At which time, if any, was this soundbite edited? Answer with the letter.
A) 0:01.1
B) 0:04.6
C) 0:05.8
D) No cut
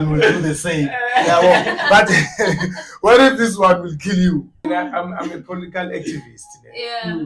B